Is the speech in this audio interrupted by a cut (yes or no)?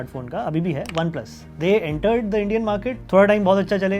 yes